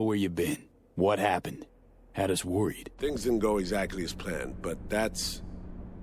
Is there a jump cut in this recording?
yes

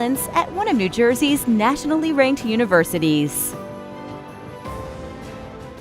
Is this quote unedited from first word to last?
no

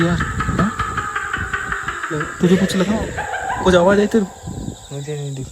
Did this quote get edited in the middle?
no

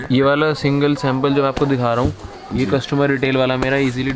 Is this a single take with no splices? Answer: yes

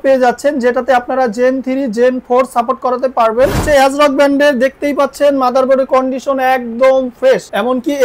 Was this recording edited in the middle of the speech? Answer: yes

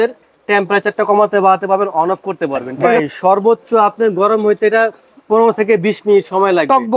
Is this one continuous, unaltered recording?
no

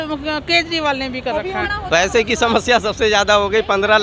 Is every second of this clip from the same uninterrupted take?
no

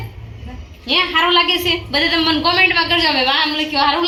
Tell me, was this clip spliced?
no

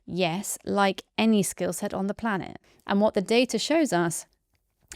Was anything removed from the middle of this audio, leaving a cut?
yes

